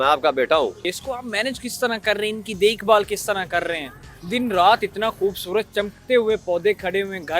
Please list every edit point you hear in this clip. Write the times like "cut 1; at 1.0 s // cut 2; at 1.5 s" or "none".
cut 1; at 0.9 s